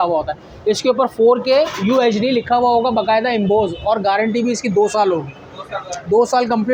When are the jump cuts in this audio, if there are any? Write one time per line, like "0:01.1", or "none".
none

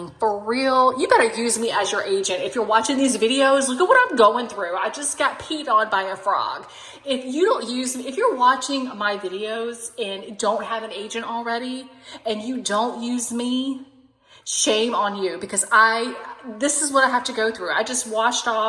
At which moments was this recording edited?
none

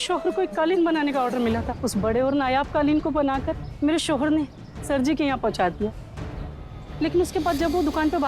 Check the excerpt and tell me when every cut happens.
0:01.7

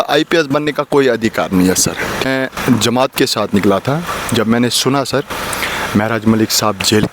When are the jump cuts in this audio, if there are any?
0:02.2

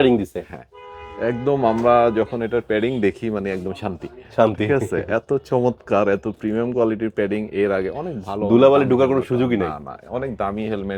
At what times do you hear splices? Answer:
none

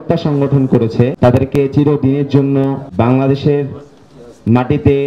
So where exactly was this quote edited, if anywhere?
0:01.1
0:02.8

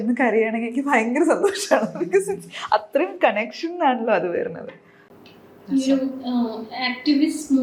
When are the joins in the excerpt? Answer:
none

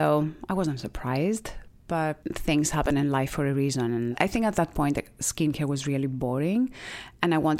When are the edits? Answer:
0:02.2
0:04.2

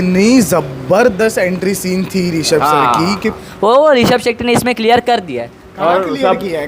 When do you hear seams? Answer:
0:03.4

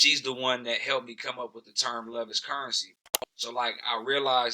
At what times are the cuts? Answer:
0:02.9

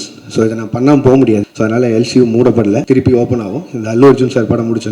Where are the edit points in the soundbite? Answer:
0:01.5
0:02.8

